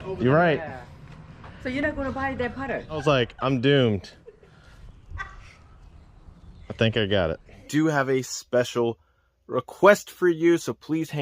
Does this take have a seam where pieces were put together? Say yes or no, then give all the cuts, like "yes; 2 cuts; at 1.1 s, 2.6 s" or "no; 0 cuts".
yes; 2 cuts; at 3.0 s, 7.6 s